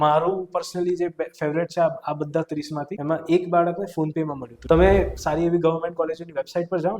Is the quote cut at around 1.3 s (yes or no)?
no